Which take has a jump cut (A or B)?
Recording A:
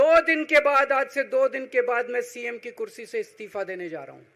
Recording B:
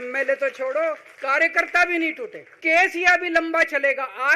B